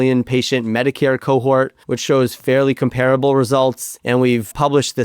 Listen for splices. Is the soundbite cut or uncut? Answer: cut